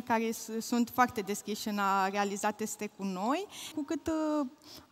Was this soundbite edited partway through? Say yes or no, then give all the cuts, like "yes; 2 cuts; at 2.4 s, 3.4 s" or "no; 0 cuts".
yes; 1 cut; at 3.7 s